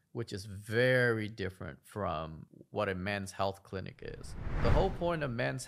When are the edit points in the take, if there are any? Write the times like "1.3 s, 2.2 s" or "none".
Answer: 4.5 s